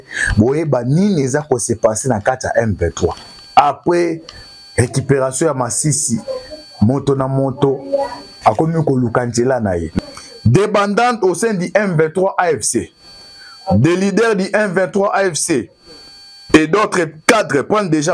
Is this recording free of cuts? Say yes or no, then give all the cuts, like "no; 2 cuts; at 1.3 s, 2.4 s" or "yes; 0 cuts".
no; 1 cut; at 9.9 s